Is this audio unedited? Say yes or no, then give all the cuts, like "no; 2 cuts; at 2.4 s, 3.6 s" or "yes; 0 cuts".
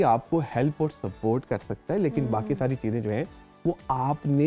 yes; 0 cuts